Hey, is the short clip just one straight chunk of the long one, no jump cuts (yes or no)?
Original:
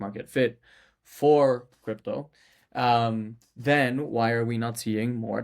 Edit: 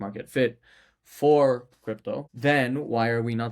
no